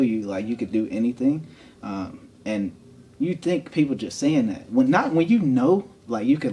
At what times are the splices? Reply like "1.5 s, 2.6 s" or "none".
none

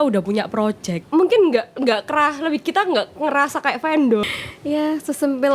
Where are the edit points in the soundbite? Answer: 0.9 s, 4.2 s

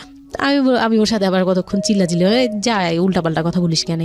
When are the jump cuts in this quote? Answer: none

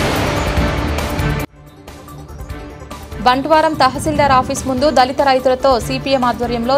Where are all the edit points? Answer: 3.2 s

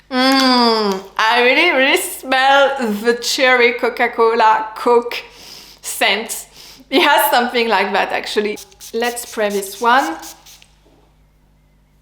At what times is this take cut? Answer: 8.6 s

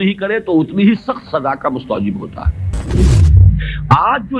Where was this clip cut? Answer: 3.1 s

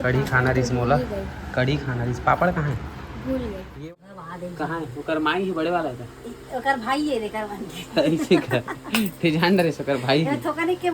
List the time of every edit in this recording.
3.8 s

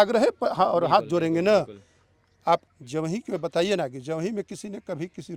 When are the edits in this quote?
2.6 s

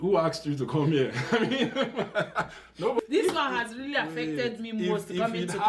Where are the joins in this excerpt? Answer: 3.0 s

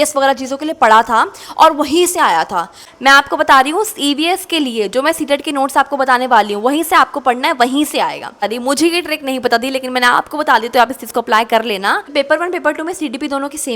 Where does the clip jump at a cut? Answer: 2.8 s, 8.5 s, 12.0 s

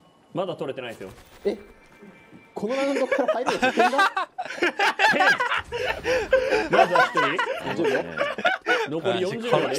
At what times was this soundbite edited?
none

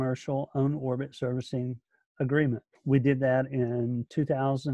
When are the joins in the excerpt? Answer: 2.8 s

